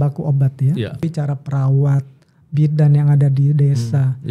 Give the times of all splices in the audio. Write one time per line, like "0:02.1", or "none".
0:01.0

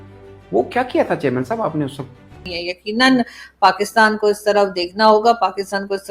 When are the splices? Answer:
0:02.6

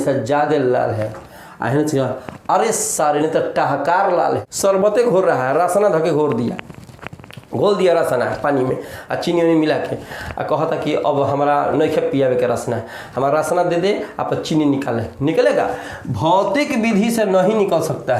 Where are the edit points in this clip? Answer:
0:04.5

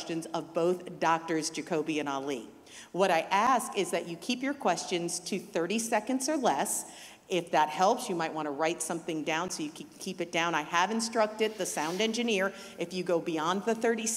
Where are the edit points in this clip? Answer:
none

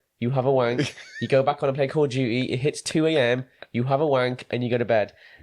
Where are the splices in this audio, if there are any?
none

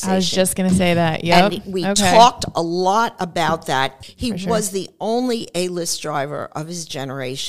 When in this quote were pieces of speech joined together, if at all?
0:04.0

